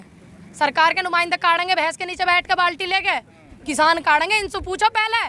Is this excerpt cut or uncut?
uncut